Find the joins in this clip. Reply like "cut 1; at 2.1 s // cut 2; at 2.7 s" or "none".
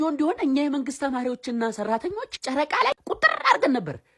none